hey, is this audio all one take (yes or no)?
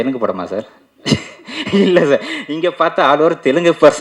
yes